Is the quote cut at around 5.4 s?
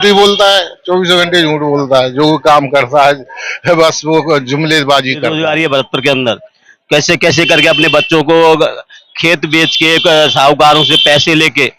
yes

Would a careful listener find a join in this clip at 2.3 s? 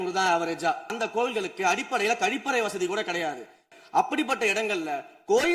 no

